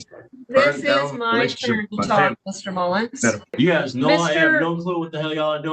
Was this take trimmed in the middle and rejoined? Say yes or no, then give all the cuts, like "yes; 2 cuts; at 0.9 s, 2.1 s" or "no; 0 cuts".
yes; 1 cut; at 3.5 s